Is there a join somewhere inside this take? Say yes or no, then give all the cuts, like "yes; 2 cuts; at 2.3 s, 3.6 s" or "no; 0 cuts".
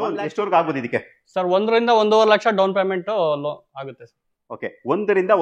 no; 0 cuts